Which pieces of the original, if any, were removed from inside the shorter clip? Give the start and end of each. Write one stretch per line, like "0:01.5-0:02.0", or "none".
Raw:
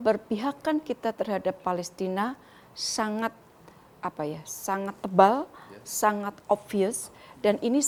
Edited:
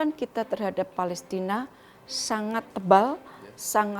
0:03.4-0:05.0